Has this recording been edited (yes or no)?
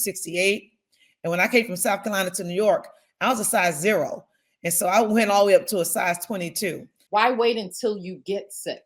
yes